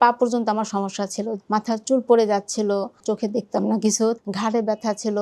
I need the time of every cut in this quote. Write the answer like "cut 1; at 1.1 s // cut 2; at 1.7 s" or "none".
cut 1; at 1.4 s // cut 2; at 3.0 s // cut 3; at 4.2 s